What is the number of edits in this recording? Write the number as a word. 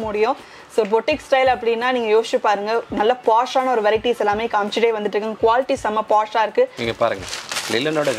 one